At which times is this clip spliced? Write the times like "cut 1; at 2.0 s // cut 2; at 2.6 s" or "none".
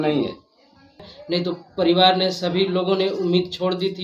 cut 1; at 1.0 s